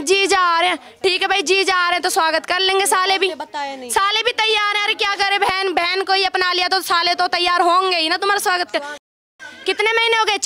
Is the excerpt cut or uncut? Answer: cut